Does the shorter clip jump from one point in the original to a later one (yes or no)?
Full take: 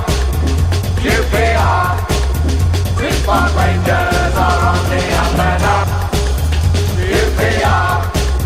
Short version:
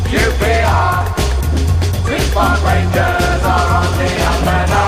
no